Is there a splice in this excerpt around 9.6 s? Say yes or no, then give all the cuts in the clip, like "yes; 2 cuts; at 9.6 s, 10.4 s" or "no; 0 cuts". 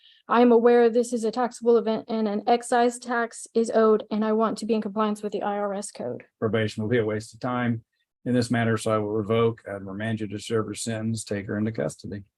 no; 1 cut; at 6.3 s